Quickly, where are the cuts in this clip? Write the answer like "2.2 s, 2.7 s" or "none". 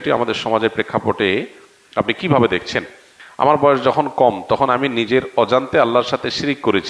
3.1 s